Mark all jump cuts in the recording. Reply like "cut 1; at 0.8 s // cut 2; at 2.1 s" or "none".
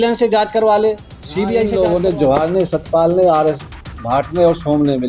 cut 1; at 1.7 s